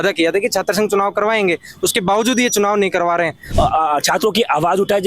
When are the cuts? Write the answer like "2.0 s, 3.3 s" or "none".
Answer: 3.4 s